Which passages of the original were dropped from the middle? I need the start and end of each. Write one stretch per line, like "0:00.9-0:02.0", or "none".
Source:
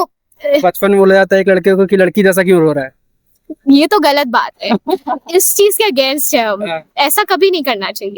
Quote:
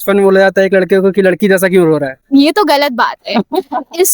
0:02.9-0:03.5